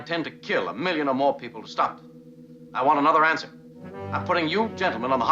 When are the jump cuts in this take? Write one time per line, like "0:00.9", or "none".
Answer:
0:03.6